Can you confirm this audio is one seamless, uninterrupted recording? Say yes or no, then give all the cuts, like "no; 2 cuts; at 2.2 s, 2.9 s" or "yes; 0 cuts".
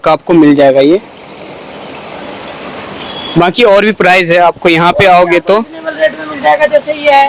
yes; 0 cuts